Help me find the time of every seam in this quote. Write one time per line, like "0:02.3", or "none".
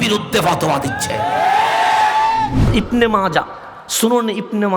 0:02.7